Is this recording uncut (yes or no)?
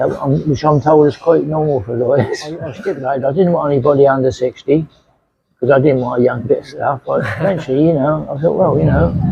no